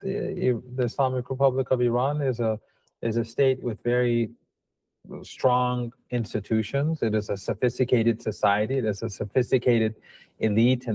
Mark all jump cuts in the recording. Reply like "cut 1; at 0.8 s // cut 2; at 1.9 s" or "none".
none